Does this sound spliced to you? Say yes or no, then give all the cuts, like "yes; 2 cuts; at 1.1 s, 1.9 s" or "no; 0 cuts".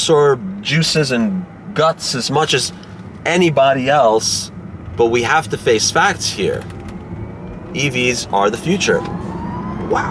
no; 0 cuts